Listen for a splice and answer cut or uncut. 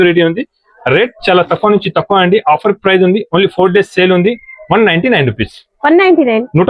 uncut